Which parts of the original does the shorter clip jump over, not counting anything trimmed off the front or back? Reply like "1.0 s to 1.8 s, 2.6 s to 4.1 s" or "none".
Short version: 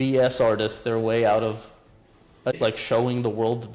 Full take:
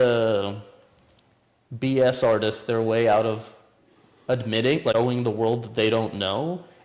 4.6 s to 4.8 s